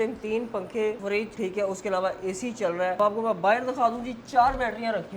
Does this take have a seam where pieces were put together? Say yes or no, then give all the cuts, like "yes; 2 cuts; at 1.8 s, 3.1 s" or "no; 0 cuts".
yes; 2 cuts; at 1.1 s, 3.0 s